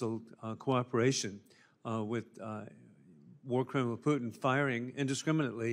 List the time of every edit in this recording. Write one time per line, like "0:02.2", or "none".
0:02.1